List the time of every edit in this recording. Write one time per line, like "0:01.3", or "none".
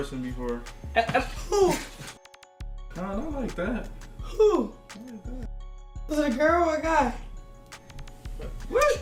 none